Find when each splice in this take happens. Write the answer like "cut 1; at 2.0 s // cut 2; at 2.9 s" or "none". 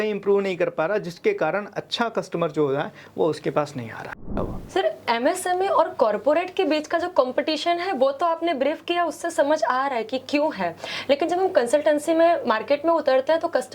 cut 1; at 4.3 s